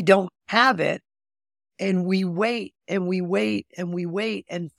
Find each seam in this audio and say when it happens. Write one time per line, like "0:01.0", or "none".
none